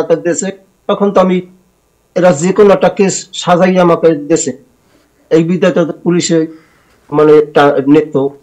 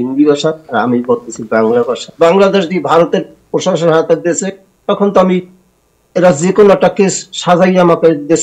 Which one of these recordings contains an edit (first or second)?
second